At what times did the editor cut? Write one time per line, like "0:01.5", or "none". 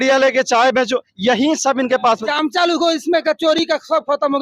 0:02.2